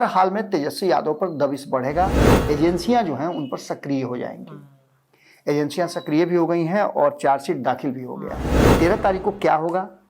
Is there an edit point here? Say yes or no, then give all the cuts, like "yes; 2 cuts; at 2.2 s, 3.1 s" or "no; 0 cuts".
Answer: yes; 2 cuts; at 2.2 s, 8.6 s